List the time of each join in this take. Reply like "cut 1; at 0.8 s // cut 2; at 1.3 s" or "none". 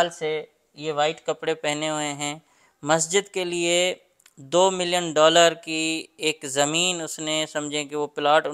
none